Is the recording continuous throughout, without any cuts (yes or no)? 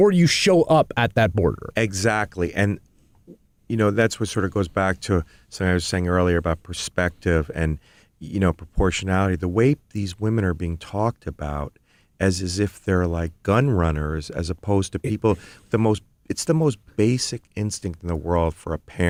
yes